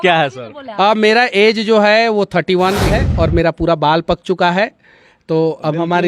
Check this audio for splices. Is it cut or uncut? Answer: cut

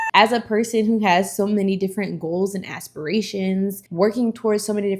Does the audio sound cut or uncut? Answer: uncut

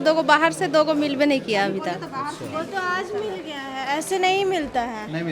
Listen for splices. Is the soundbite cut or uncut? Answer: uncut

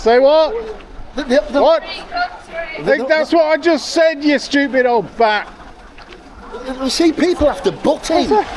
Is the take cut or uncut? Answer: uncut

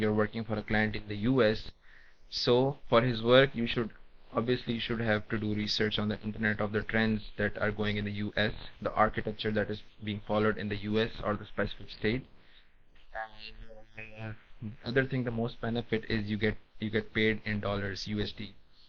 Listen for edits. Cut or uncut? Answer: uncut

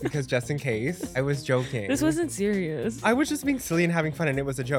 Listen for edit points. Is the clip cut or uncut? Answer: cut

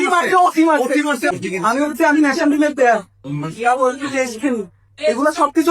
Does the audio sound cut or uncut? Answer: cut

